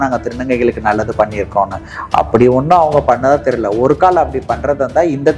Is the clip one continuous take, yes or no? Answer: yes